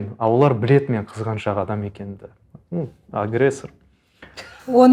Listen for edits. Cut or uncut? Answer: uncut